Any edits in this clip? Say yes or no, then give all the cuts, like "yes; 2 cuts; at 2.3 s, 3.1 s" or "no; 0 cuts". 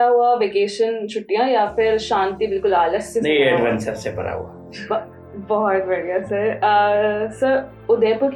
no; 0 cuts